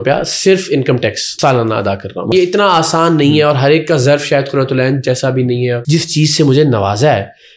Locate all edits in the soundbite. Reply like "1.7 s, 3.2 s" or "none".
1.3 s, 2.3 s, 5.8 s